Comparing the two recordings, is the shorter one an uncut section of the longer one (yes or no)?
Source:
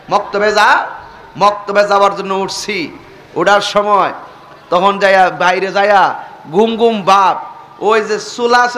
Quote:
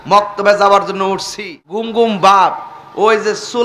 no